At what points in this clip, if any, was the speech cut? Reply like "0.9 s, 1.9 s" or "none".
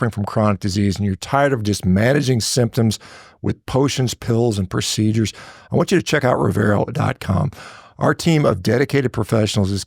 none